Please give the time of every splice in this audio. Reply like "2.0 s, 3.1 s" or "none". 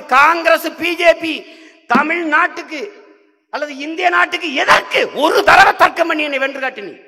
none